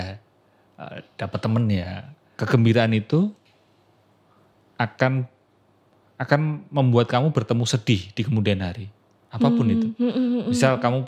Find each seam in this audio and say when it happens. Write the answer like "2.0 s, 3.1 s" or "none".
2.3 s